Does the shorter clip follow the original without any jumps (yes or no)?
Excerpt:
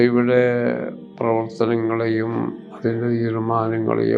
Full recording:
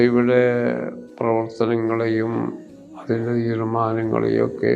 no